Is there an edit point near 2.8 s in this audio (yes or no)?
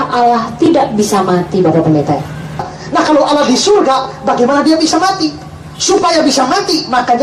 yes